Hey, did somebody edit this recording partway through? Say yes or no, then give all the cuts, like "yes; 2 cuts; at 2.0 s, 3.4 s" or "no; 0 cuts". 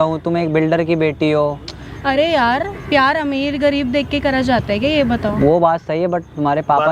no; 0 cuts